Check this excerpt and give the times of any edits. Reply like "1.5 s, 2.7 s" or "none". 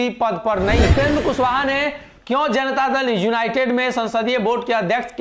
0.9 s